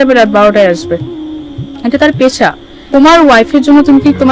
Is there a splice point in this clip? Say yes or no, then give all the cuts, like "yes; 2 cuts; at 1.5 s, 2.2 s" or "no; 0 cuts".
yes; 1 cut; at 2.8 s